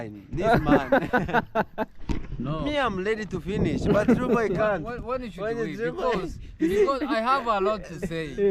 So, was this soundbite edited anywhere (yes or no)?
yes